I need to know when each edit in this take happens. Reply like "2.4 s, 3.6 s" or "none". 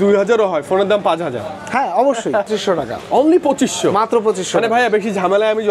2.5 s